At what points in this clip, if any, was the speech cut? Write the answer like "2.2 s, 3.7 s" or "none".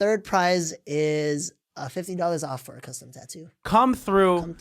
3.5 s